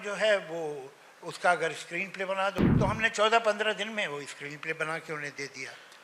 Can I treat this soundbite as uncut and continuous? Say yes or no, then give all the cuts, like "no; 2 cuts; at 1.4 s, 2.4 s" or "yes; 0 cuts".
no; 1 cut; at 2.7 s